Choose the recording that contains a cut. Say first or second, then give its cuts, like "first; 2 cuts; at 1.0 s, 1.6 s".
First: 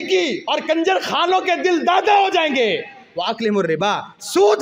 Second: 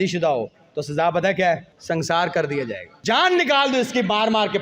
second; 2 cuts; at 1.7 s, 2.9 s